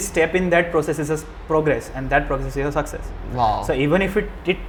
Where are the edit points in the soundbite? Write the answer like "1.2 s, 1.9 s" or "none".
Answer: none